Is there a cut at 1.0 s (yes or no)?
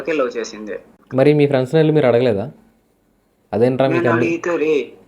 yes